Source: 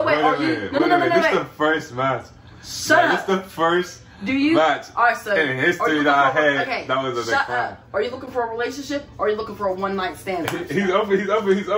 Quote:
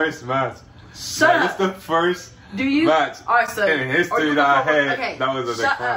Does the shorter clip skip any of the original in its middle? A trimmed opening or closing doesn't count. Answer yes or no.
no